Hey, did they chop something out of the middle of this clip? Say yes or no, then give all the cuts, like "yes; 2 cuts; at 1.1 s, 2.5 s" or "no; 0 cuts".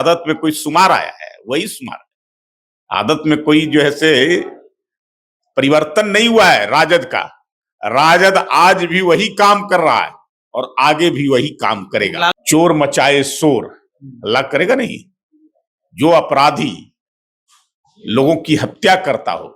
yes; 1 cut; at 12.3 s